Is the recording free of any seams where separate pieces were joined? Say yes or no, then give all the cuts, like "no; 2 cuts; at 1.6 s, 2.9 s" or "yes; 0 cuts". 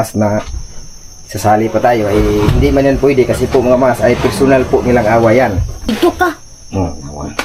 no; 1 cut; at 5.9 s